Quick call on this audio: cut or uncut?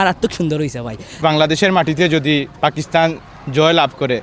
cut